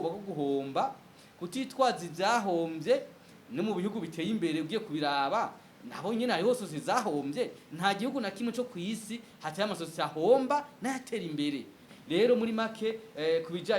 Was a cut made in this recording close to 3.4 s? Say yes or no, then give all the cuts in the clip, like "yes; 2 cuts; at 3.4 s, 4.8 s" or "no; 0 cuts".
no; 1 cut; at 11.8 s